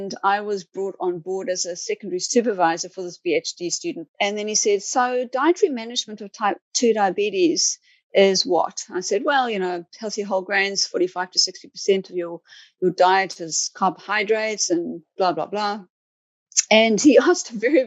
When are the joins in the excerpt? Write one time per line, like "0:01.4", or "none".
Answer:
0:04.0